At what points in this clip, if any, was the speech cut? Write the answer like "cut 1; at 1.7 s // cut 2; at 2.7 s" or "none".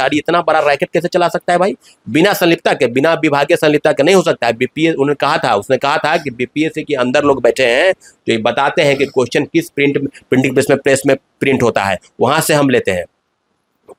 none